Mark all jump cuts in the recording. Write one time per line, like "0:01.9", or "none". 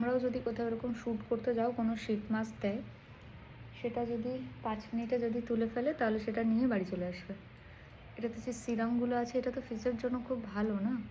none